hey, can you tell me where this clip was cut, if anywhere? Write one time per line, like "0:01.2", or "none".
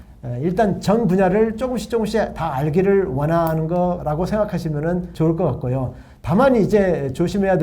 0:04.0
0:05.1